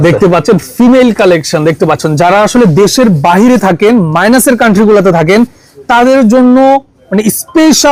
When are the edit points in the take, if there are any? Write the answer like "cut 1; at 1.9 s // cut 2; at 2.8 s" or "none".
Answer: none